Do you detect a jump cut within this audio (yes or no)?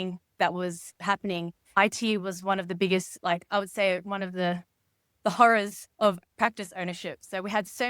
yes